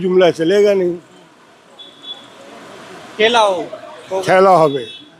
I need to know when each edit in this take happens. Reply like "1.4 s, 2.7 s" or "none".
none